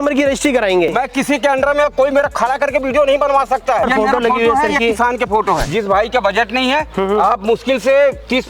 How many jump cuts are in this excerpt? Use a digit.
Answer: 2